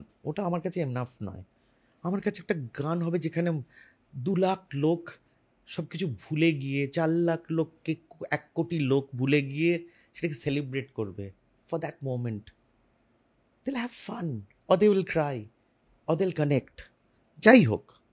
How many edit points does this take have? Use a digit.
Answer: 0